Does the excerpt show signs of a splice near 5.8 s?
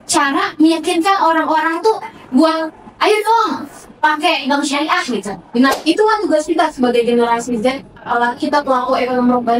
yes; 1 cut; at 5.8 s

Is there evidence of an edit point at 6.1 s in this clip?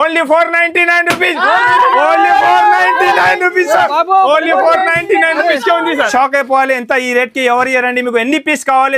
yes; 1 cut; at 6.1 s

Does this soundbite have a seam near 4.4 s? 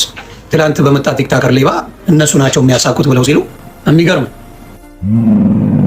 yes; 2 cuts; at 1.9 s, 4.4 s

